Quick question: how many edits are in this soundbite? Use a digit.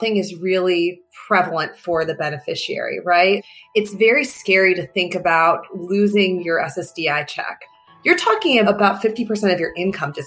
1